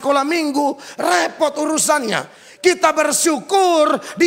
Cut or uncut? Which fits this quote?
uncut